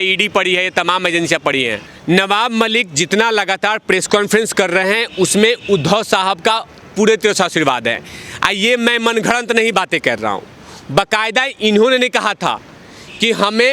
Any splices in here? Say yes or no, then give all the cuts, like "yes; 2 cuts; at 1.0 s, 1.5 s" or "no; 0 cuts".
yes; 1 cut; at 1.9 s